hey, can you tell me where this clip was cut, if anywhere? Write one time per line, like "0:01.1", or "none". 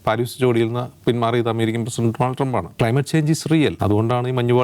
0:02.7
0:03.8